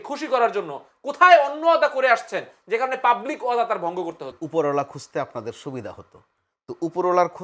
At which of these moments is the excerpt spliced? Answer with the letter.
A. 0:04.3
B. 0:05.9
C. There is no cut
A